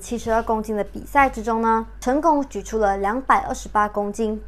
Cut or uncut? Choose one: cut